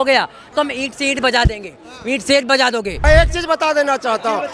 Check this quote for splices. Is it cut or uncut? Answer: cut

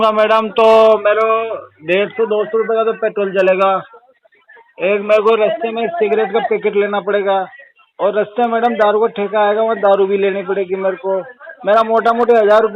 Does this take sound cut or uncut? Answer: uncut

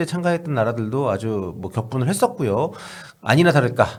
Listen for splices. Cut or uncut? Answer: uncut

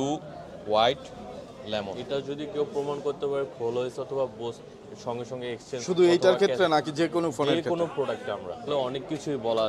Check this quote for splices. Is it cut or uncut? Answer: cut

